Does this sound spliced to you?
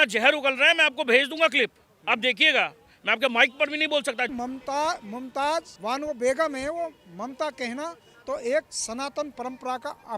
yes; 2 cuts; at 4.3 s, 5.7 s

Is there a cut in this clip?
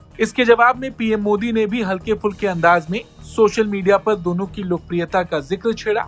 no; 0 cuts

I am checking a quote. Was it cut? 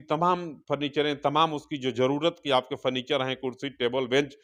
no; 0 cuts

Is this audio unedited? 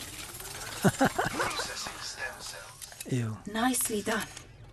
yes; 0 cuts

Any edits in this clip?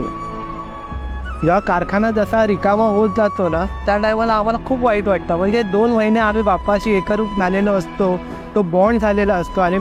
no; 0 cuts

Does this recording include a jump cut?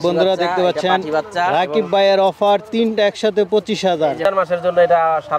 yes; 1 cut; at 4.2 s

